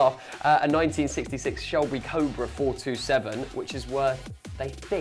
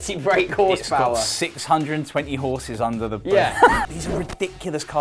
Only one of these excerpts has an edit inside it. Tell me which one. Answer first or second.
second